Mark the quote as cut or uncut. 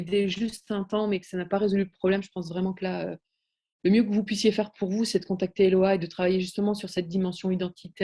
uncut